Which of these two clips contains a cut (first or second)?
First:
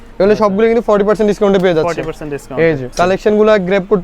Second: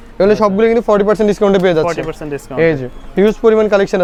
first